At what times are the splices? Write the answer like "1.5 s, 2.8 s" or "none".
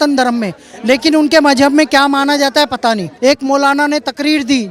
3.1 s